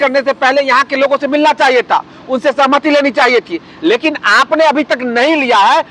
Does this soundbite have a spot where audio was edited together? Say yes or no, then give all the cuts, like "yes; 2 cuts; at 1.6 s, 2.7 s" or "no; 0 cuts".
no; 0 cuts